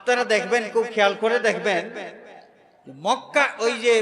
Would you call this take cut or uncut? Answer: uncut